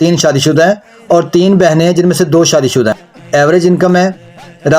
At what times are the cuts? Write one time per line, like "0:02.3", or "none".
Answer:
0:03.1